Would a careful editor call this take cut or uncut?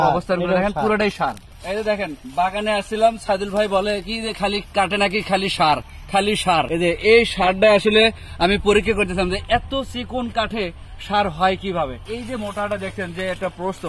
cut